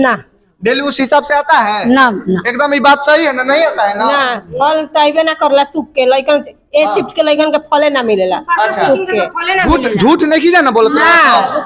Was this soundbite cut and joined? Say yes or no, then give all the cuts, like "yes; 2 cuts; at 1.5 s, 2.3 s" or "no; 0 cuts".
no; 0 cuts